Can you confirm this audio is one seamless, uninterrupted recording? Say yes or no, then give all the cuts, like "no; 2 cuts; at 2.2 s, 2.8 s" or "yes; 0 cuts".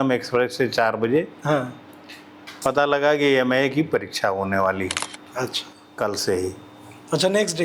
yes; 0 cuts